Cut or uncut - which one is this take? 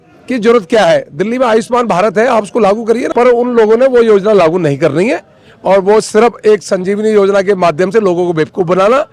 cut